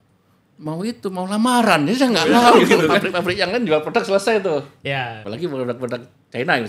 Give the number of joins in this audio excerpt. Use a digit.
2